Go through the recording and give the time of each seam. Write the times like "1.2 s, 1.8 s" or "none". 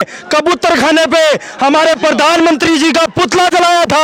none